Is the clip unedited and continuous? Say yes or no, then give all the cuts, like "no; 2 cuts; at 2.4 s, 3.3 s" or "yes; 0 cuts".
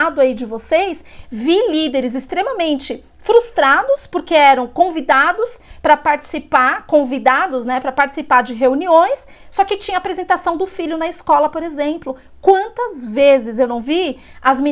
yes; 0 cuts